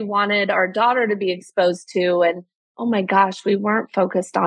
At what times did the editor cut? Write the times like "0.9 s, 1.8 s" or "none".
none